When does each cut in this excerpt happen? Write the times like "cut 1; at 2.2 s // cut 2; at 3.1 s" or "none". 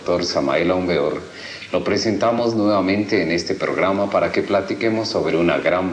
cut 1; at 1.5 s